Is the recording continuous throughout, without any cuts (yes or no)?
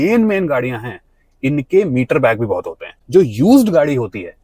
no